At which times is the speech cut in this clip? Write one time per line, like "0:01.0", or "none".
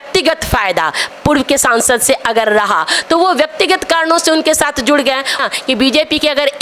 0:05.4